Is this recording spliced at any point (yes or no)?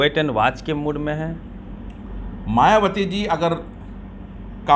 no